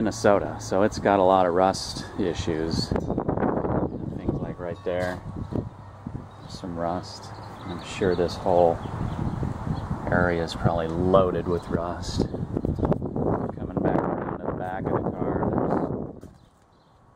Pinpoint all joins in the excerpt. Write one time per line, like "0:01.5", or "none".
0:06.3